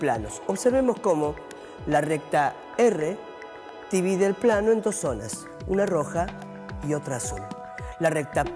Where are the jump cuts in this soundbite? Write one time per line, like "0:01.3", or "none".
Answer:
0:07.2

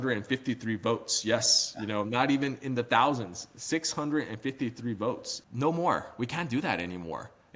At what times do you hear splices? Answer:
0:05.3

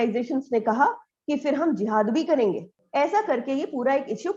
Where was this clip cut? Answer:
0:02.7

